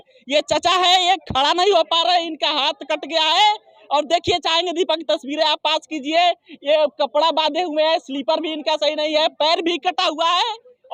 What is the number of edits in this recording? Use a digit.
0